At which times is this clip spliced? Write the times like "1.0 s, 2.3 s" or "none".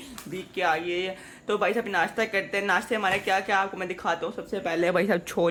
none